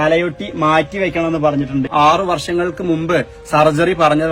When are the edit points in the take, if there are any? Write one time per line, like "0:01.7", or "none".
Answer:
0:01.9